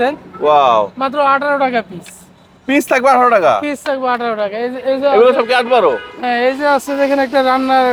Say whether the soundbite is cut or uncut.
uncut